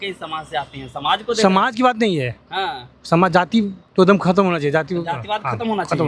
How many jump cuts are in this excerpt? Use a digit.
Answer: 1